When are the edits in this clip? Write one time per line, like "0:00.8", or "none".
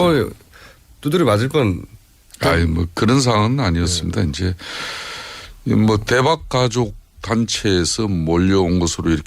0:03.9